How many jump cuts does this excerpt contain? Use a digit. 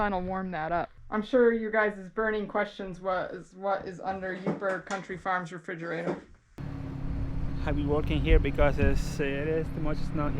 2